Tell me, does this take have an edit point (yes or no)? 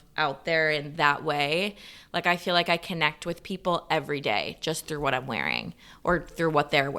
no